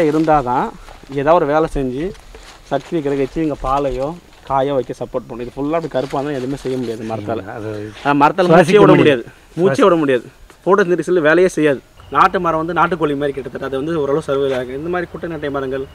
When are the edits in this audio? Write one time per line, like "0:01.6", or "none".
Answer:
0:12.0